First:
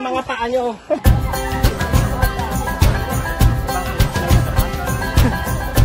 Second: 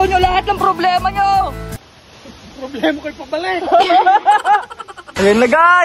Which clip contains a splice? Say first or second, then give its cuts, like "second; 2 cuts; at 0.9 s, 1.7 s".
first; 1 cut; at 1.0 s